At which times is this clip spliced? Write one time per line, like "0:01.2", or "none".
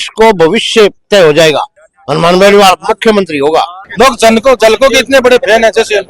0:03.8